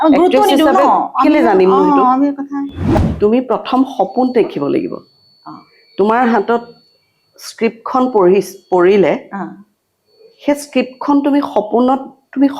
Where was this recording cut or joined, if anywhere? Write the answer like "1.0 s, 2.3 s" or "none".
2.8 s